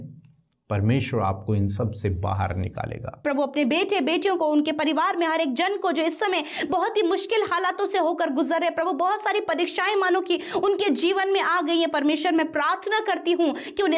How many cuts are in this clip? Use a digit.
1